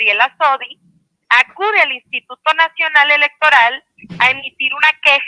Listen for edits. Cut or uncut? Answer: uncut